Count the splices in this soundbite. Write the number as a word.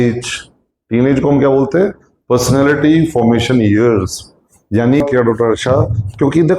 one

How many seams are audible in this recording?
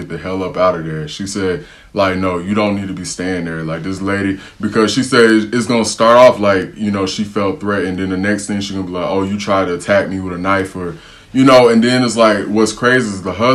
zero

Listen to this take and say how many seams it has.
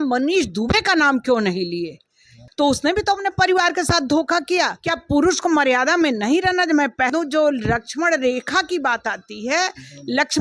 three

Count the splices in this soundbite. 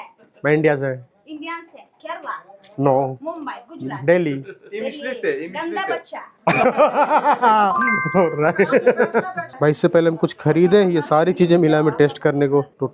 zero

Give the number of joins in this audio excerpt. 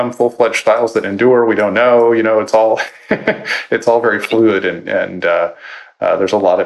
zero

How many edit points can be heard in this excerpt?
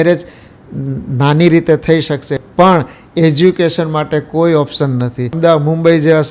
one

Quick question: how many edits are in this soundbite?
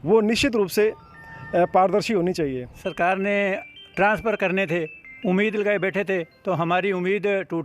one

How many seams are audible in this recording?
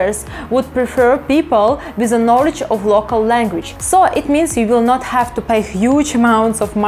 one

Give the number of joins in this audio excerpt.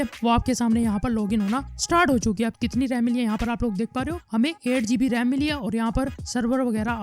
one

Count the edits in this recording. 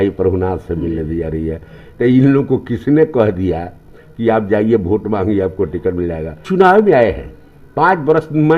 one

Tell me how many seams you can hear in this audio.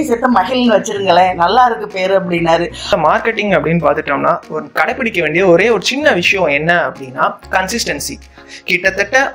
two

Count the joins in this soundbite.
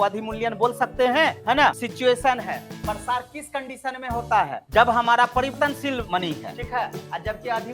two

